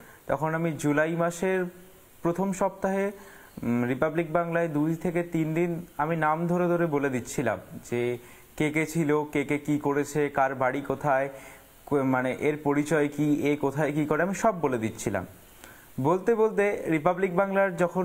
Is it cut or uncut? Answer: uncut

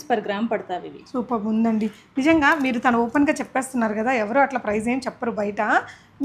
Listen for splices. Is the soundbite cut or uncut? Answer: uncut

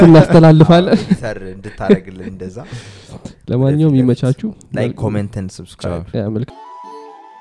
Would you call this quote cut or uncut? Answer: cut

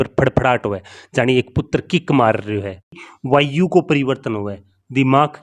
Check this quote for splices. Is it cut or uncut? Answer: cut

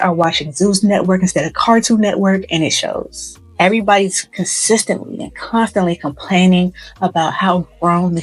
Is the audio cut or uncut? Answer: uncut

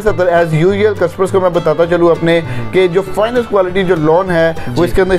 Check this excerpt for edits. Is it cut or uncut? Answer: uncut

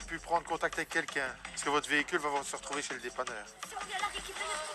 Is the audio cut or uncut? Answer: cut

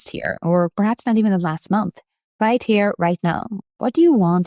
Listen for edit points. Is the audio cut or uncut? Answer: cut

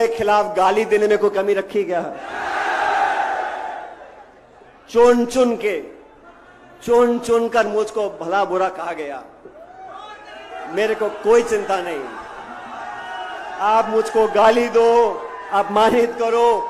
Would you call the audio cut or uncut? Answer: uncut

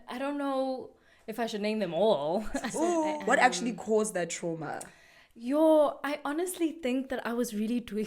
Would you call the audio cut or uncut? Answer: cut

